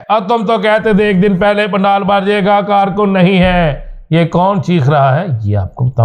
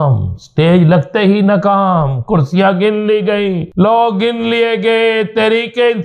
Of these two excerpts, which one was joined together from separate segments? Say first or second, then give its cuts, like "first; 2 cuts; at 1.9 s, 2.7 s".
second; 1 cut; at 3.6 s